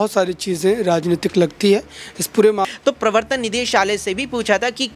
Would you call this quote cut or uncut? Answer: cut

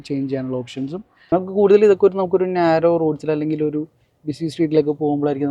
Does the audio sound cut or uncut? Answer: cut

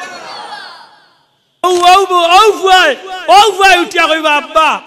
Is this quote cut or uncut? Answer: cut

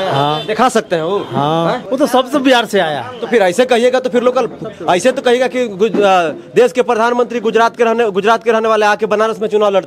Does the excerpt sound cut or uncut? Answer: uncut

